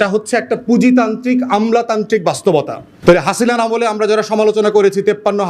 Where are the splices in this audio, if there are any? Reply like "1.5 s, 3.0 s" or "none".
2.8 s

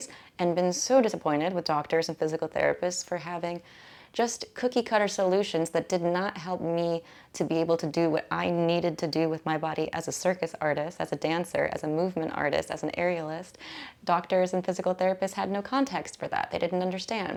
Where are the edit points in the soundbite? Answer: none

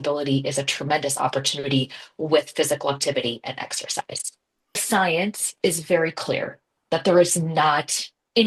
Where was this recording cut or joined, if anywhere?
4.8 s

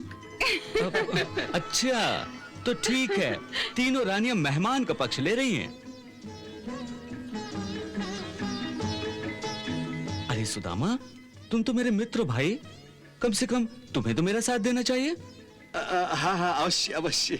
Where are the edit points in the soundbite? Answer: none

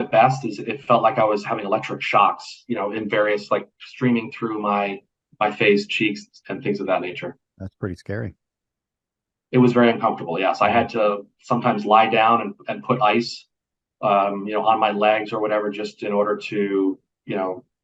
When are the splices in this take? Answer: none

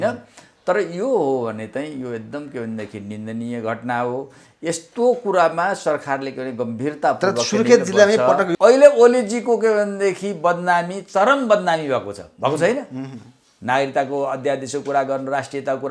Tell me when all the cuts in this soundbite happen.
8.5 s

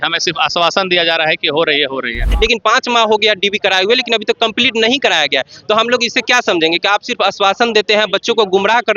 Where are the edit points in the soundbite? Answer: 2.2 s

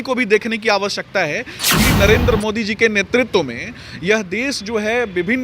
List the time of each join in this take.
1.9 s

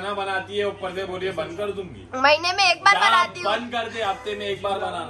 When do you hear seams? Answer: none

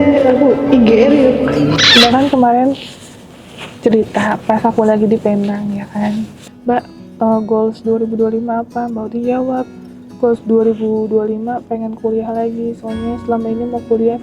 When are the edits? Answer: 1.8 s, 6.4 s

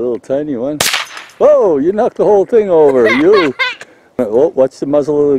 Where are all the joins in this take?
4.2 s

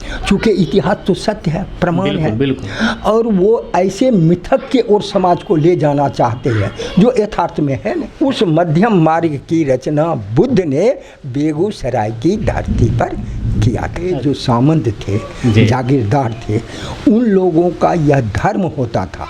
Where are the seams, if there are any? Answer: 8.1 s, 14.0 s

